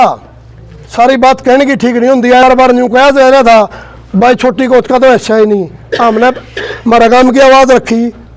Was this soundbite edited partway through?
yes; 1 cut; at 2.4 s

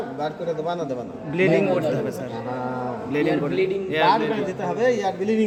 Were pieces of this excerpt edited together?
no; 0 cuts

